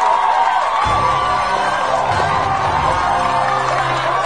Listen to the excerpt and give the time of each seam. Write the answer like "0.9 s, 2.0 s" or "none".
none